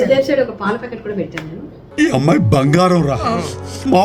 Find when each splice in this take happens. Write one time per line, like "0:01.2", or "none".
none